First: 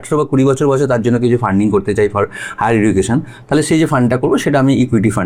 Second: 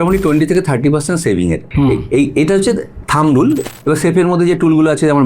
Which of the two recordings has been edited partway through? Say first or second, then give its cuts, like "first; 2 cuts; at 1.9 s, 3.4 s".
second; 2 cuts; at 1.6 s, 3.6 s